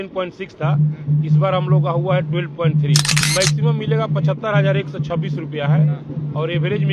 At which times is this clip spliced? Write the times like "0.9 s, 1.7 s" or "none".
3.2 s